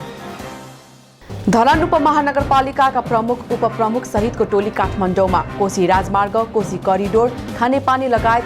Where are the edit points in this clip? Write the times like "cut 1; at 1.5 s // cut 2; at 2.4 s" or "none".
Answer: cut 1; at 1.0 s